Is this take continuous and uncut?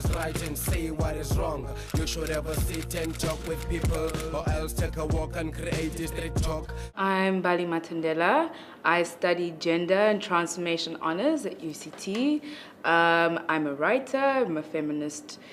no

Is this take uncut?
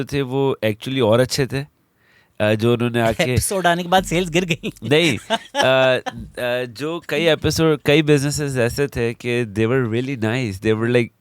yes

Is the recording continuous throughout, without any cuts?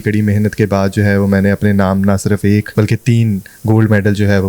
no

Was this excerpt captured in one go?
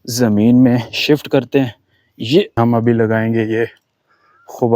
no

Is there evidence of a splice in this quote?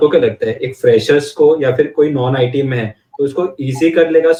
no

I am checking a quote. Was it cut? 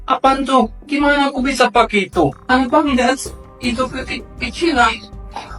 no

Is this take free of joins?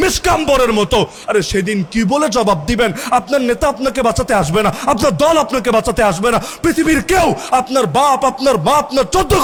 yes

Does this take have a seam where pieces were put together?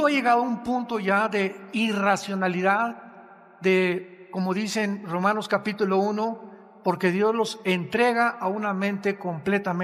no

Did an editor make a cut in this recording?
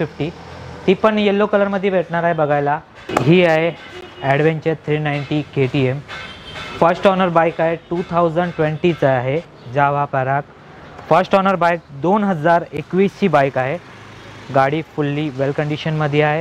yes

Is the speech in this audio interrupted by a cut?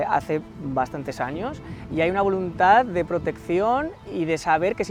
no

